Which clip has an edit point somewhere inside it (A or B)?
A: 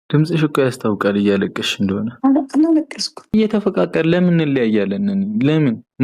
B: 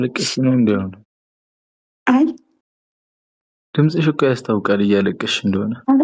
A